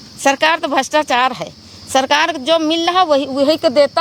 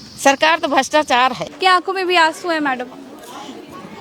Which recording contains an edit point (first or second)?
second